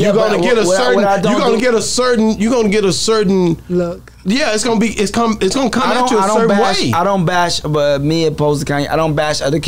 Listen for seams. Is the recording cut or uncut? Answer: uncut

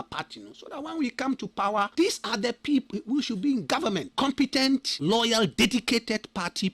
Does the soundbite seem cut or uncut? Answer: cut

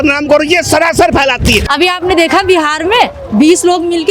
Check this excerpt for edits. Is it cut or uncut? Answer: cut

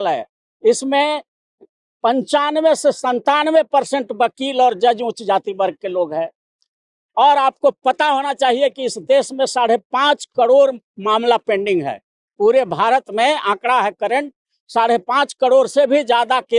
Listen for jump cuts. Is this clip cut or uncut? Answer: uncut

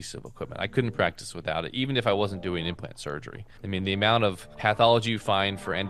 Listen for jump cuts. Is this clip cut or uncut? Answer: uncut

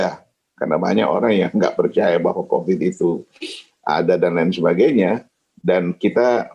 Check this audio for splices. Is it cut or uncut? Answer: uncut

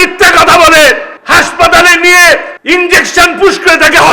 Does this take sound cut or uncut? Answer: cut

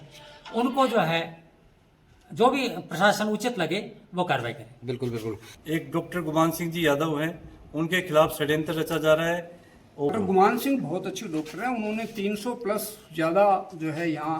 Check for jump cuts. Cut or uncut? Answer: cut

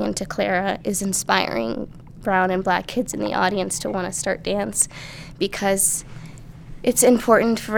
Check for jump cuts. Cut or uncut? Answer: uncut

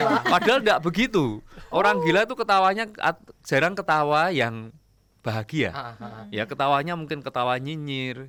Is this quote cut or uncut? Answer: uncut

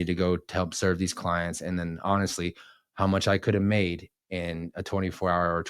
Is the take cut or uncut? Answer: uncut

